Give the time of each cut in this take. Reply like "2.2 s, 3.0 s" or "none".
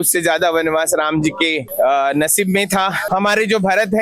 3.0 s